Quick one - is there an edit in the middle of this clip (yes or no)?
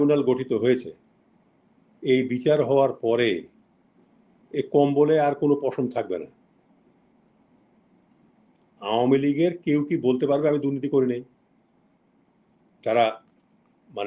no